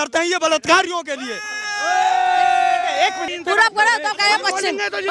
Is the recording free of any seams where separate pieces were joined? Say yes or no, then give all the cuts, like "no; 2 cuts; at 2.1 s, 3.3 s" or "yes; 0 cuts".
no; 1 cut; at 3.2 s